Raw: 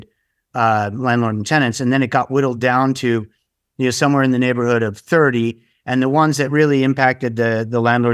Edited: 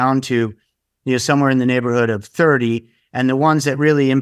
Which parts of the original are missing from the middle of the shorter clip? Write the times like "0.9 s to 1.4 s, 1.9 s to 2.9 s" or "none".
none